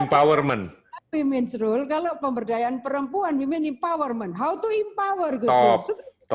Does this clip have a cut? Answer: no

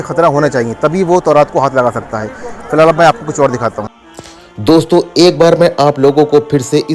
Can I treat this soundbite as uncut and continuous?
yes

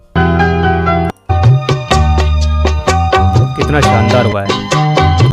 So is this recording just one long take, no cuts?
yes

